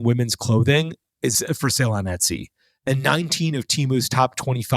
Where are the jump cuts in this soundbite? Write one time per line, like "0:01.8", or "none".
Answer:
0:01.4